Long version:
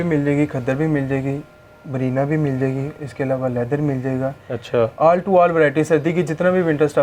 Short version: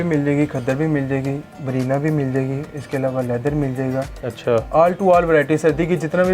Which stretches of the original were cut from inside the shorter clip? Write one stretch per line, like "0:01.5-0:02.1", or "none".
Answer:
0:01.5-0:01.8